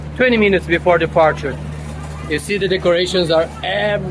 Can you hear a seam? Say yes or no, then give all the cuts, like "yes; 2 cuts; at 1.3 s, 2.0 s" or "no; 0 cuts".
no; 0 cuts